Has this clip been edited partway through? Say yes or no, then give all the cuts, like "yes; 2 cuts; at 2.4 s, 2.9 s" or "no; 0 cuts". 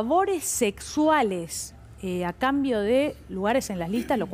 no; 0 cuts